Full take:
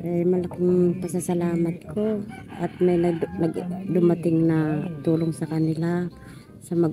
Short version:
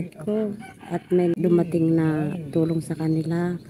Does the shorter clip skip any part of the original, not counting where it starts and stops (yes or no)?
yes